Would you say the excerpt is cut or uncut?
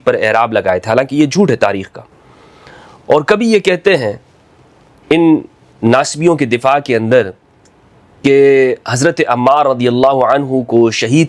uncut